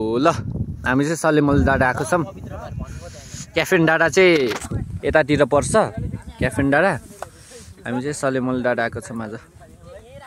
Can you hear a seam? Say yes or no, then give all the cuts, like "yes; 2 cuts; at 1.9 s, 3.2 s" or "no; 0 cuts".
no; 0 cuts